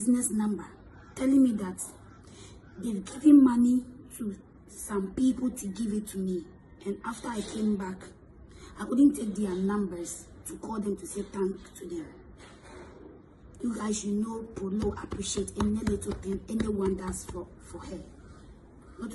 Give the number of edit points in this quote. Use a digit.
0